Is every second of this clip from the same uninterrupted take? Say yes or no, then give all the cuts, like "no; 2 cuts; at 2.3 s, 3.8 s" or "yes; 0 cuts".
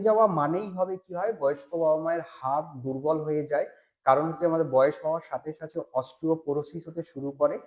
yes; 0 cuts